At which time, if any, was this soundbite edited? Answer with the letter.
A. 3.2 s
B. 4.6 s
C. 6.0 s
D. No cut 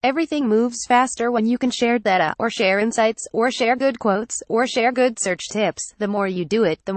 C